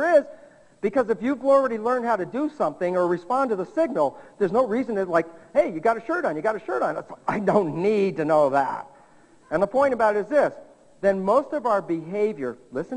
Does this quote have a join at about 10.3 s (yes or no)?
yes